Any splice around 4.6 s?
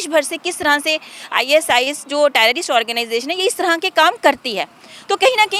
no; 0 cuts

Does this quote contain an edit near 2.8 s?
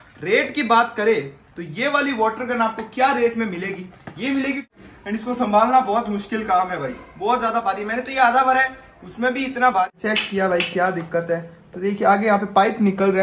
no; 2 cuts; at 4.6 s, 9.9 s

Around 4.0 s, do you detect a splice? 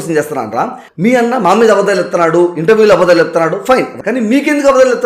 yes; 1 cut; at 4.0 s

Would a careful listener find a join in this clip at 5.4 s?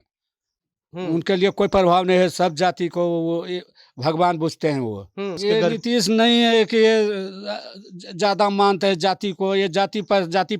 yes; 1 cut; at 5.4 s

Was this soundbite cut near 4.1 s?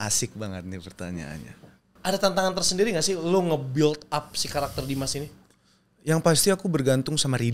no; 1 cut; at 1.9 s

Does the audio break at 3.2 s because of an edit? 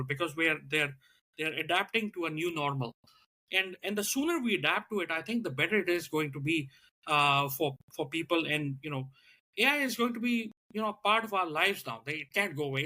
yes; 1 cut; at 3.2 s

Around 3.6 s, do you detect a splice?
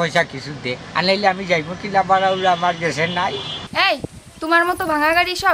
yes; 1 cut; at 3.6 s

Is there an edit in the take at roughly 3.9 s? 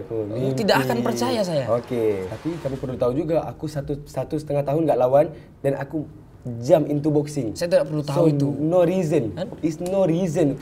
no; 1 cut; at 2.2 s

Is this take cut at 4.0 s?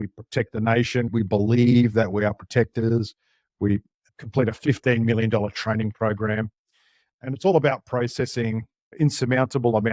yes; 2 cuts; at 1.1 s, 4.0 s

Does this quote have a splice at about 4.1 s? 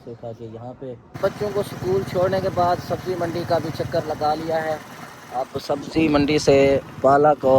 no; 1 cut; at 1.2 s

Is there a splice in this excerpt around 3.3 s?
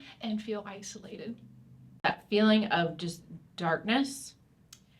no; 1 cut; at 2.0 s

